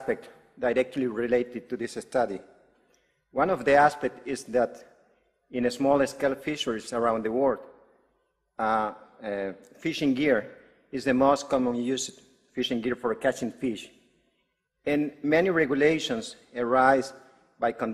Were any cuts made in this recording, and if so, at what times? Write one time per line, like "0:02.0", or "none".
none